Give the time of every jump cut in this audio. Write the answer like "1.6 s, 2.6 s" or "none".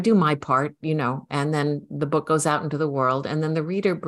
none